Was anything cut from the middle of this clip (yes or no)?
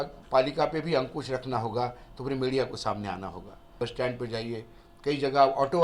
yes